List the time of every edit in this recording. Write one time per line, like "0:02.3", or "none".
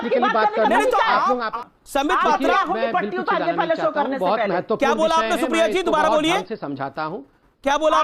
0:01.5